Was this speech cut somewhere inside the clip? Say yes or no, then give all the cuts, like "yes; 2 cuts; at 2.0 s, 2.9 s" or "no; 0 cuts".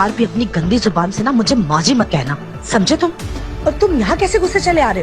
no; 0 cuts